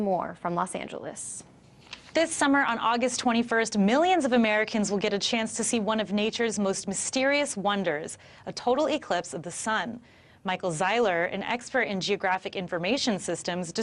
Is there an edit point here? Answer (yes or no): yes